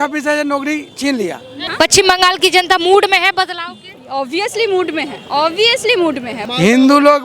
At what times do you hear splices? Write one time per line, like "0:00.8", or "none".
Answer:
0:01.6
0:06.3